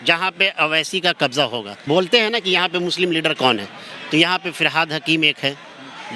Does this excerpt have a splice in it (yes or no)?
yes